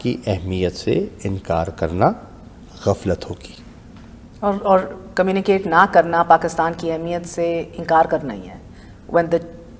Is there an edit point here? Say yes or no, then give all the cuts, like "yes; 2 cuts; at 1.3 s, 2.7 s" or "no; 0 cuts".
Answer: no; 0 cuts